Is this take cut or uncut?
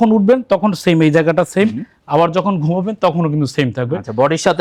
uncut